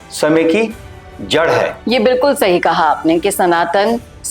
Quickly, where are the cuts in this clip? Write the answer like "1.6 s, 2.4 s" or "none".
none